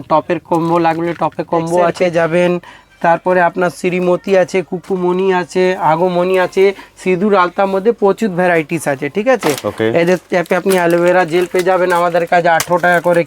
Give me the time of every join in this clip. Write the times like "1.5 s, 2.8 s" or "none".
2.0 s